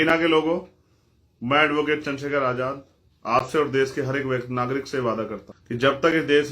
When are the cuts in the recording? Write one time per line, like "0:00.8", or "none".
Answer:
0:05.5